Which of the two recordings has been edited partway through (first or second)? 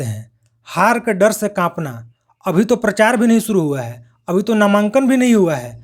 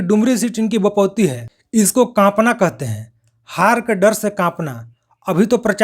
second